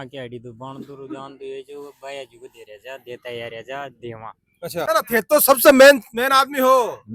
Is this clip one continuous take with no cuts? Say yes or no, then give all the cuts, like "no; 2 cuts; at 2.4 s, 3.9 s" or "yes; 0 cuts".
no; 1 cut; at 4.9 s